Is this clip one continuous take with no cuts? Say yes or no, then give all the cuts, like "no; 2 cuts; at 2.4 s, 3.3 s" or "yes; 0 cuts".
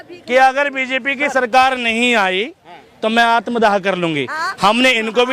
yes; 0 cuts